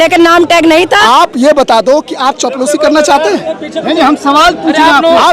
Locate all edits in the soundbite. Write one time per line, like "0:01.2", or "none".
0:01.0